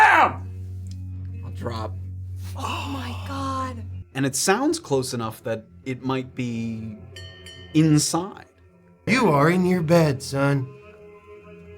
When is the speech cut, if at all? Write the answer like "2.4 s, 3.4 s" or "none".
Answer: 3.9 s, 9.0 s

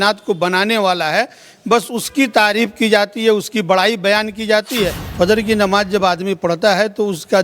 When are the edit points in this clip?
5.0 s

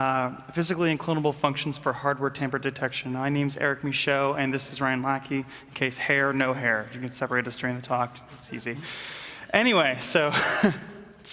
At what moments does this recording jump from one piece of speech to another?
6.5 s

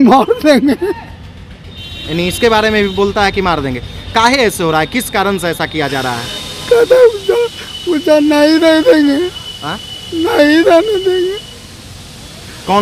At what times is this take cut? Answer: none

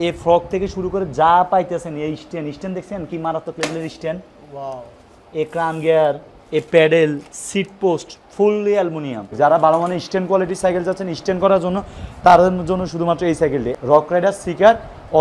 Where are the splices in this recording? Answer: 9.3 s, 13.7 s

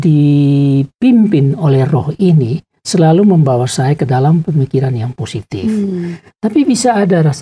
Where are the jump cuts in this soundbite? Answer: 6.2 s

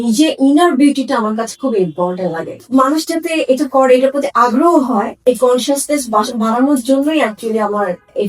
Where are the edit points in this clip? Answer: 2.6 s, 5.2 s

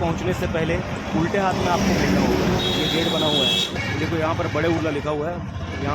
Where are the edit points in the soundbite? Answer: 1.0 s, 3.8 s

